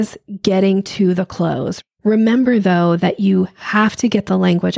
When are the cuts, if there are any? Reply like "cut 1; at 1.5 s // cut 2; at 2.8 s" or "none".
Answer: cut 1; at 1.7 s

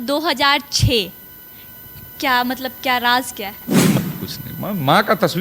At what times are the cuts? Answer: cut 1; at 3.9 s

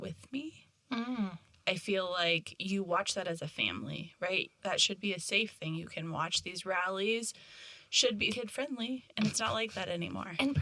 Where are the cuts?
cut 1; at 8.4 s

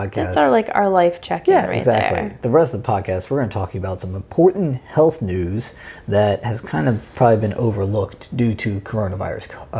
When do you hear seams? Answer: none

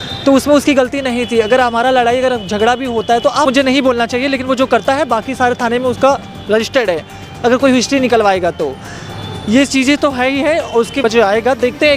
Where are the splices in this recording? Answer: cut 1; at 3.5 s // cut 2; at 11.0 s

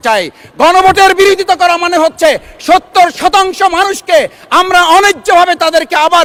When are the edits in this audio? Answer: none

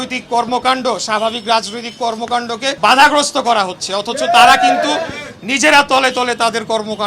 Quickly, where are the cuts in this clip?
cut 1; at 2.8 s

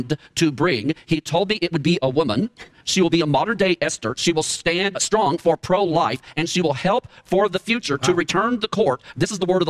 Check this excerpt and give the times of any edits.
none

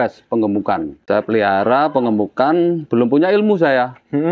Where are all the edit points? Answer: cut 1; at 0.9 s

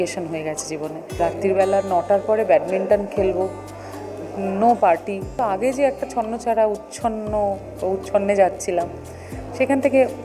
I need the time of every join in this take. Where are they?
cut 1; at 1.2 s // cut 2; at 5.4 s

